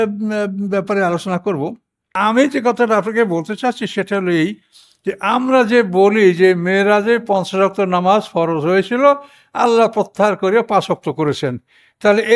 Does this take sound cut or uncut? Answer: cut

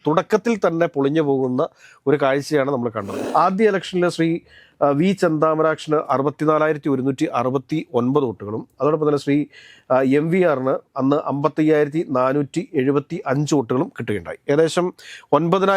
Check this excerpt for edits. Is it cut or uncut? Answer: cut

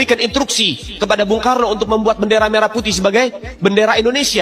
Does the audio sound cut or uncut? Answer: uncut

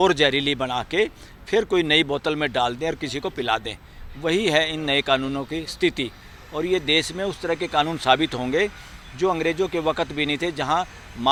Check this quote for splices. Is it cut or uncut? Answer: uncut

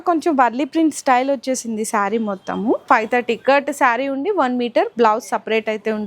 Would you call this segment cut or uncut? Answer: cut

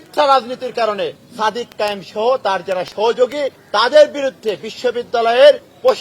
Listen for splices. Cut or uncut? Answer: cut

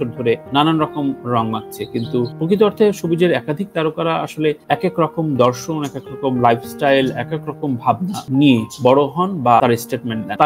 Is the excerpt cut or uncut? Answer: uncut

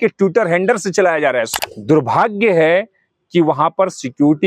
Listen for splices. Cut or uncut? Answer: cut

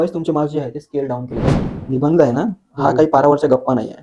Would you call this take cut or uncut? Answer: cut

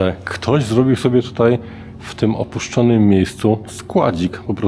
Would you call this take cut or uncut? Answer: uncut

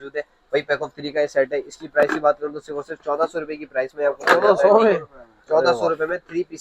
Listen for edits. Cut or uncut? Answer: uncut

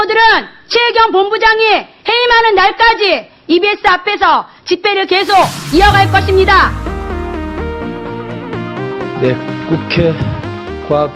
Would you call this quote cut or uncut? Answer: cut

